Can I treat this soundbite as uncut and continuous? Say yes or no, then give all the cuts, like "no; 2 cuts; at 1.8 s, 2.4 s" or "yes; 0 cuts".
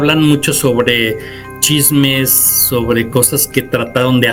yes; 0 cuts